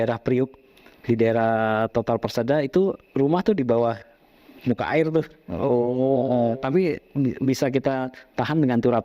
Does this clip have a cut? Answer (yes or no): no